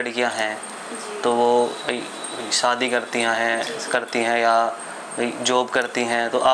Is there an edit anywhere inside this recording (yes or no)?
no